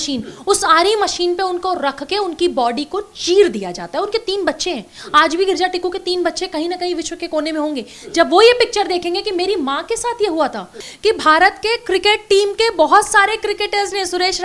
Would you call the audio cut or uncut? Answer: cut